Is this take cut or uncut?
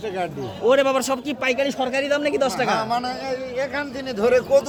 uncut